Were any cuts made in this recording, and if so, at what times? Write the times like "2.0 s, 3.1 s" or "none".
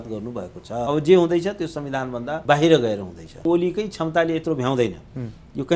0.9 s, 2.3 s, 3.4 s